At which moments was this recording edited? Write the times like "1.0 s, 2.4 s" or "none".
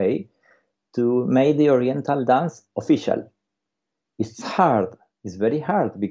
none